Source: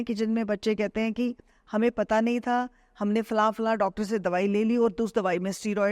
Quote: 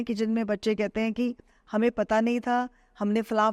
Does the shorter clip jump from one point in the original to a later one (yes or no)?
no